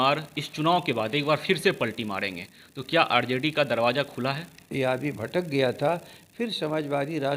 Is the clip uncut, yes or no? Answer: no